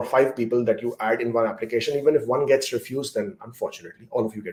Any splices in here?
no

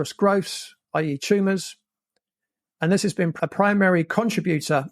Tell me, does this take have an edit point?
yes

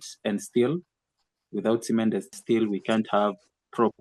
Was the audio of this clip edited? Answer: yes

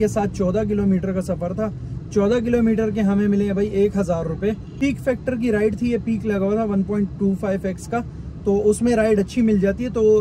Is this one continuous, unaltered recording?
no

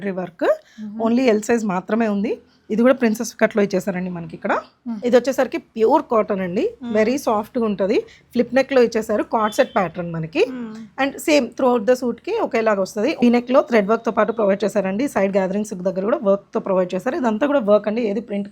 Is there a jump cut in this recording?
yes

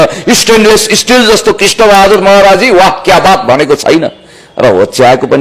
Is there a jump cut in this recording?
no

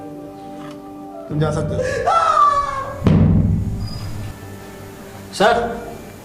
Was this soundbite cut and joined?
yes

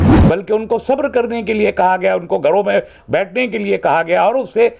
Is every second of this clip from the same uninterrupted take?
yes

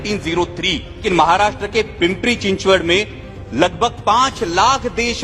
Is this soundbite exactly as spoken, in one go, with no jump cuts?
no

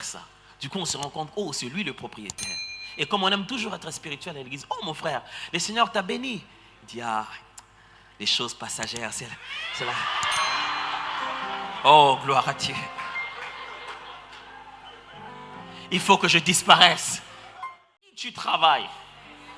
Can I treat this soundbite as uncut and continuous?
no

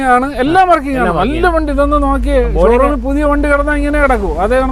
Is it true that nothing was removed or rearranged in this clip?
yes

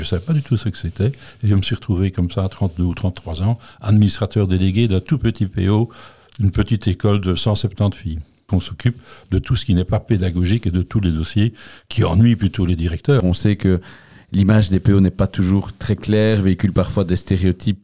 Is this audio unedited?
no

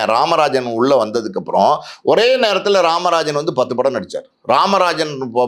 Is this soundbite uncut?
yes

